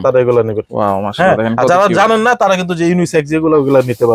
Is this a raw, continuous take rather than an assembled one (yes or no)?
yes